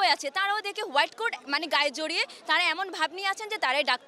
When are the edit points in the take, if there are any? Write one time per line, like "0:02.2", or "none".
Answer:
none